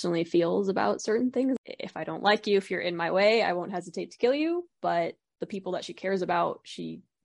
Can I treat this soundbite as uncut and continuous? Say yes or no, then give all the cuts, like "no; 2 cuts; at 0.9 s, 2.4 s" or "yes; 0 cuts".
no; 1 cut; at 1.6 s